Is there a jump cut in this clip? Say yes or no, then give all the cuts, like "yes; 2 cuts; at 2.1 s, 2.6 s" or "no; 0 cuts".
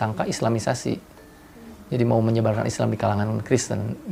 no; 0 cuts